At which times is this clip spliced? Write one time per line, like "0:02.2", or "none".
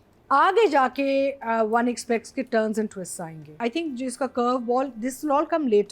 0:03.5